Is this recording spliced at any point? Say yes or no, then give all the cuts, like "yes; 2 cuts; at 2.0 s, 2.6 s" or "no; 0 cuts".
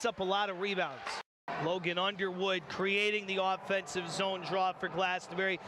yes; 1 cut; at 1.3 s